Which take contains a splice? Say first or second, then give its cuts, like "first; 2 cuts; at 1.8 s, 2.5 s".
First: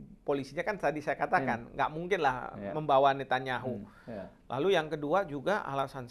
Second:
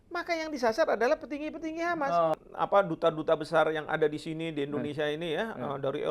second; 1 cut; at 2.3 s